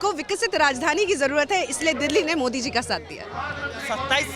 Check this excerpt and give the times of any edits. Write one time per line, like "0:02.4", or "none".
none